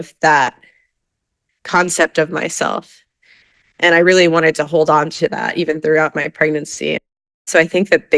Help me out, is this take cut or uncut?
cut